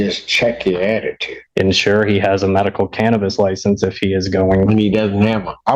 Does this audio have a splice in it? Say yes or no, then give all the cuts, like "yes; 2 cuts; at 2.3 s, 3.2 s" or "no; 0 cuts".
yes; 1 cut; at 1.5 s